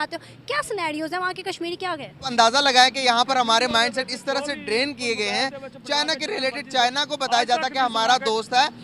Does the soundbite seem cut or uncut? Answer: cut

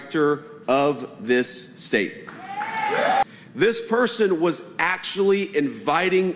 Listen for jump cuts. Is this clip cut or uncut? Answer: cut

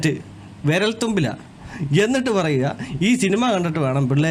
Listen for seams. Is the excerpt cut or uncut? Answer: uncut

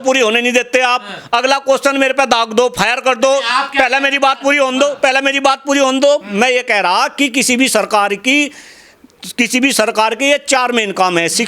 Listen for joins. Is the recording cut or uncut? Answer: uncut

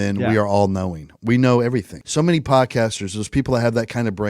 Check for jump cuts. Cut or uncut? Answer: cut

